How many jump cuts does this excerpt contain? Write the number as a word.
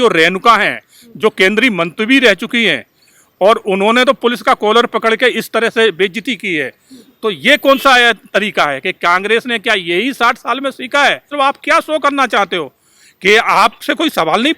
one